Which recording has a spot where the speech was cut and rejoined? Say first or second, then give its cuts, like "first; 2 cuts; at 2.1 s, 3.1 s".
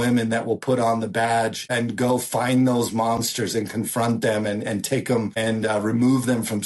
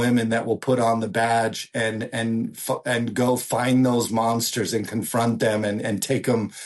first; 2 cuts; at 1.6 s, 5.3 s